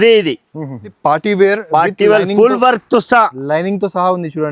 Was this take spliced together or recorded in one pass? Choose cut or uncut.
cut